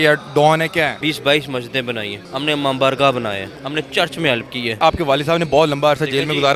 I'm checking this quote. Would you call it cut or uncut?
cut